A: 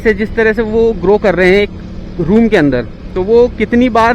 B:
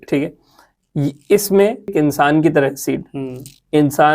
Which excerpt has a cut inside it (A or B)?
B